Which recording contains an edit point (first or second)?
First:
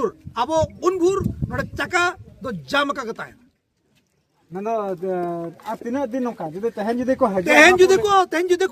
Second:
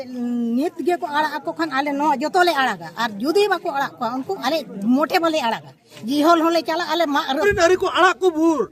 second